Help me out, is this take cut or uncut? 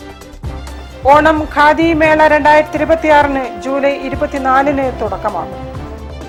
uncut